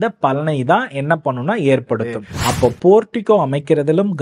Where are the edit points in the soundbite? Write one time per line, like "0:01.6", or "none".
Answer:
0:02.3